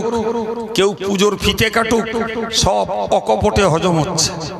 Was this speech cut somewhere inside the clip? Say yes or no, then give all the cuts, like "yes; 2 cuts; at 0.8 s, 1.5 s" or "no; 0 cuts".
no; 0 cuts